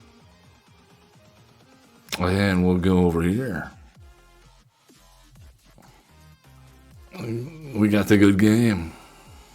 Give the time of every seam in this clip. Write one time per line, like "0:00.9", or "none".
0:06.0